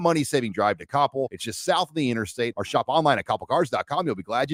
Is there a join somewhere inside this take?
no; 0 cuts

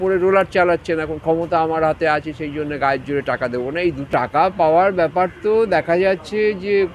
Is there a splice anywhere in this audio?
yes; 1 cut; at 4.1 s

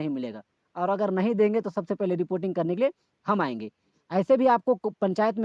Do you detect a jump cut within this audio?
no; 0 cuts

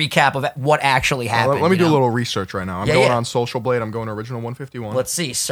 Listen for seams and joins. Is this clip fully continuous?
yes; 0 cuts

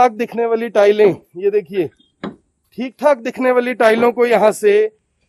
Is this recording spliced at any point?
no; 0 cuts

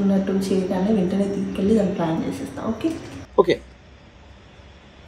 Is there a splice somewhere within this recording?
no; 0 cuts

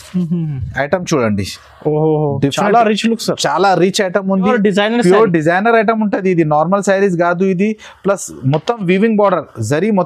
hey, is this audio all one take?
no; 1 cut; at 4.5 s

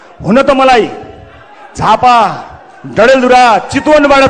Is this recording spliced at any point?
no; 0 cuts

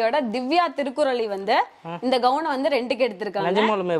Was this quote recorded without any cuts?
yes; 0 cuts

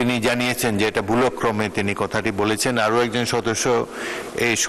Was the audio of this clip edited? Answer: no; 0 cuts

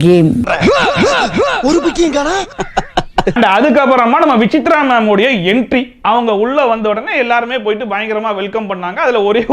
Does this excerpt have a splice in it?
no; 0 cuts

